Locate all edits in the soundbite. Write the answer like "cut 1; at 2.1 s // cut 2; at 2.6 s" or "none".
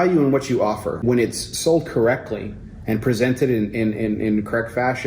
cut 1; at 1.0 s